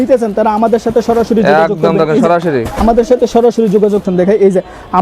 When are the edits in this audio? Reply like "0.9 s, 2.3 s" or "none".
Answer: 4.0 s